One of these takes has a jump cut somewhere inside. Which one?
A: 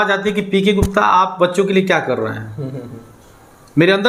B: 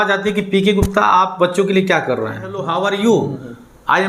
B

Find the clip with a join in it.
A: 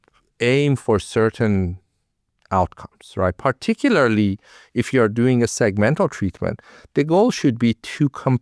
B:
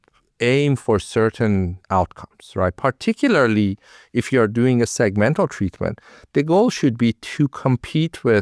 B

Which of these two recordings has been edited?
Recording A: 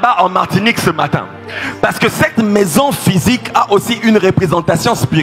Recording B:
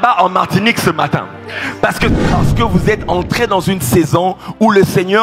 B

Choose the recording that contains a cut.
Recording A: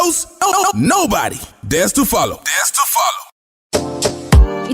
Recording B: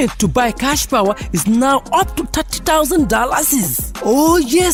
A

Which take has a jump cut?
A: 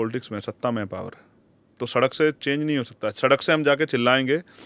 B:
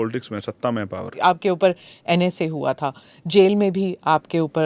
B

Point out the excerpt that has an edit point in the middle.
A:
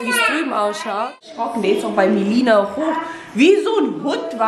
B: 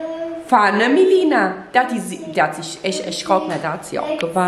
A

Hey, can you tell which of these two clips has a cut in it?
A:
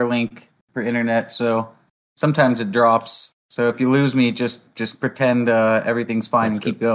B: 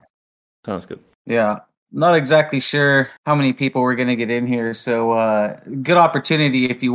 B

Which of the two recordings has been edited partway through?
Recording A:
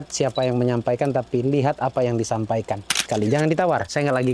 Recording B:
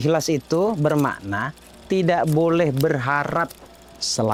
A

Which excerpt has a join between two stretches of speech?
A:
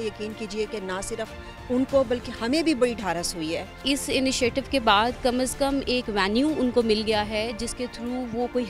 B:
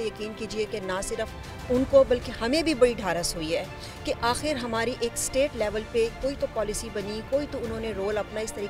A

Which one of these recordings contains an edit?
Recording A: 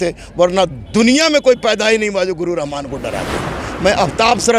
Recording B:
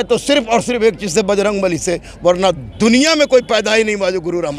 A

